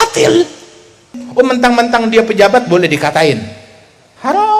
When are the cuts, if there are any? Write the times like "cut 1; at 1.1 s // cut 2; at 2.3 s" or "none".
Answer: cut 1; at 1.2 s